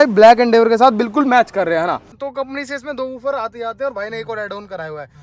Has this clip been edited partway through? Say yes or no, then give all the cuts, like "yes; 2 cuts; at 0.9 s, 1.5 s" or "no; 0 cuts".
yes; 1 cut; at 2.2 s